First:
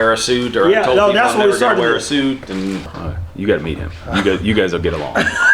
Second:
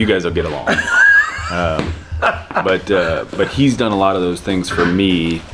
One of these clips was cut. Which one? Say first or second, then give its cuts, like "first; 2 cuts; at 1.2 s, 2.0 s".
first; 1 cut; at 2.9 s